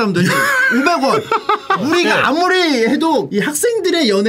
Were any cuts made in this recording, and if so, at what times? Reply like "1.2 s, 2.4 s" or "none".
1.8 s, 3.3 s